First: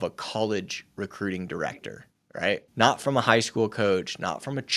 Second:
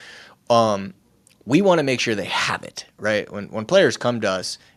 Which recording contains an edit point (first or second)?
first